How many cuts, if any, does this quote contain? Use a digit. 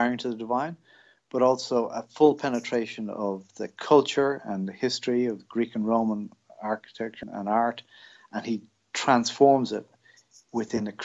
1